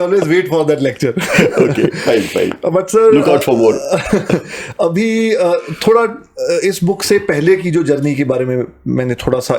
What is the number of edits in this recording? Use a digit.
0